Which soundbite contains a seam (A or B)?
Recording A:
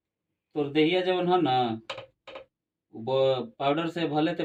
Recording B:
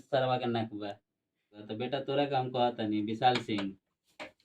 B